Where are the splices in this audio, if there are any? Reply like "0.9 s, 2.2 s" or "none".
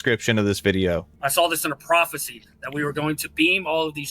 1.2 s